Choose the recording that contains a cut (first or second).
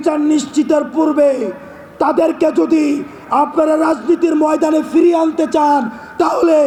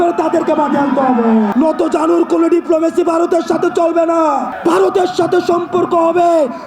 second